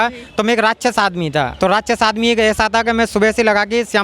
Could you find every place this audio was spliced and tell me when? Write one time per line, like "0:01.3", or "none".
0:01.5